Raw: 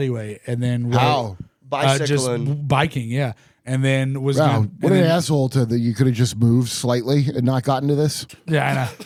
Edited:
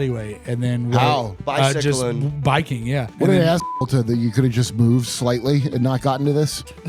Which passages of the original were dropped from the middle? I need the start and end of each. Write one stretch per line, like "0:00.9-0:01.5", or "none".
0:01.4-0:01.6
0:03.3-0:04.7